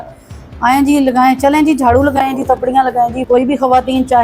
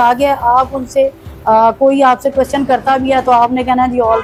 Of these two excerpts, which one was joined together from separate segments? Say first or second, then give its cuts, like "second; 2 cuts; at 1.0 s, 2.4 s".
first; 1 cut; at 3.2 s